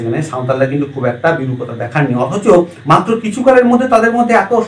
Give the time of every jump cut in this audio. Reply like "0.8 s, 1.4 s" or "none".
none